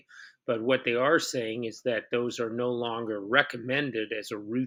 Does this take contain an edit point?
no; 0 cuts

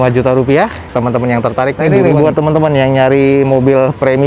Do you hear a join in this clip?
yes; 1 cut; at 2.0 s

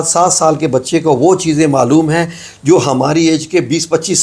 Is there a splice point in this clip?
no; 0 cuts

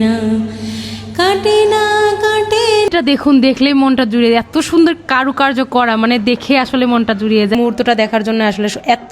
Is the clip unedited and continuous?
no; 2 cuts; at 2.9 s, 7.5 s

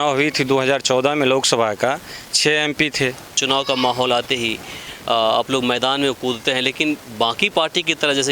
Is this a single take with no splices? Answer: no; 1 cut; at 3.4 s

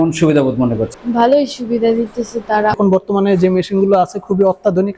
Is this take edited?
yes; 1 cut; at 2.8 s

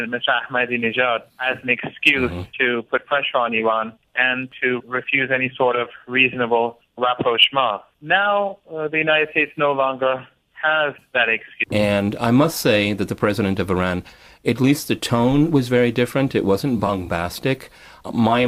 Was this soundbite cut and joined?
no; 0 cuts

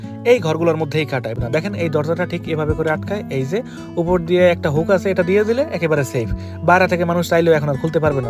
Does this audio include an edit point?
yes; 1 cut; at 1.4 s

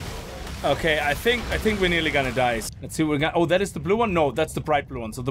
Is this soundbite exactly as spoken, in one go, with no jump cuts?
no; 1 cut; at 2.6 s

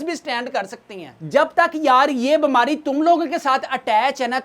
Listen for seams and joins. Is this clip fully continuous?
no; 1 cut; at 1.1 s

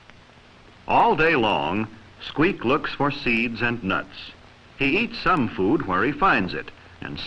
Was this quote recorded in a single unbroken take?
no; 1 cut; at 1.3 s

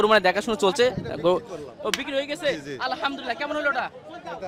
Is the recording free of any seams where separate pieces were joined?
yes; 0 cuts

